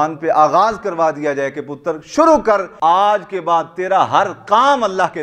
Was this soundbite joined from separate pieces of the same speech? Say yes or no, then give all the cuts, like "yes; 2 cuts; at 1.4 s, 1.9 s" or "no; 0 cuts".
yes; 1 cut; at 2.7 s